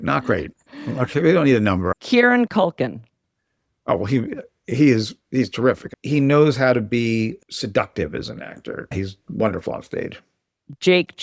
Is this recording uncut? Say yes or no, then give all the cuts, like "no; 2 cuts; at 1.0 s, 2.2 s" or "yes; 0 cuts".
no; 3 cuts; at 1.9 s, 5.9 s, 8.7 s